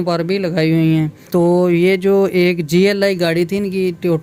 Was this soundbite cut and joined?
yes; 1 cut; at 1.2 s

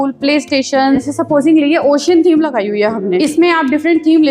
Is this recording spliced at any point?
yes; 2 cuts; at 1.1 s, 3.2 s

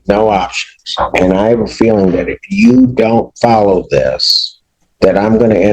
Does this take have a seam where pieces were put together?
no; 0 cuts

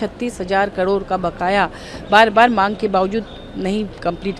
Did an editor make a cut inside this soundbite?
no; 0 cuts

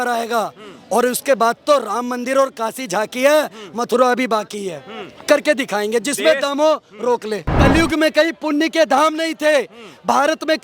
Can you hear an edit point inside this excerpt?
yes; 1 cut; at 7.5 s

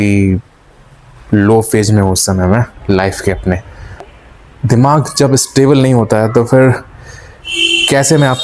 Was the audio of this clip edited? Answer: yes; 1 cut; at 4.2 s

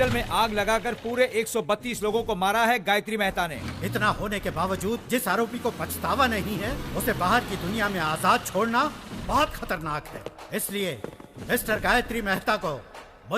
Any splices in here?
yes; 1 cut; at 3.5 s

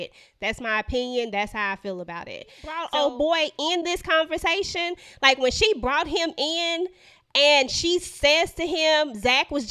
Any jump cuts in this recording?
yes; 1 cut; at 2.8 s

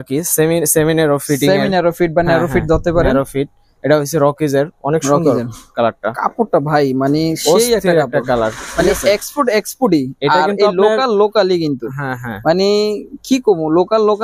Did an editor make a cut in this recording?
no; 0 cuts

